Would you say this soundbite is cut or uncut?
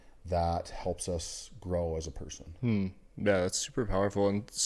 uncut